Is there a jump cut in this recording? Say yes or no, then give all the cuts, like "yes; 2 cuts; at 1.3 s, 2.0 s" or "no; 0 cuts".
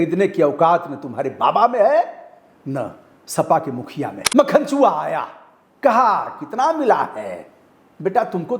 yes; 1 cut; at 4.2 s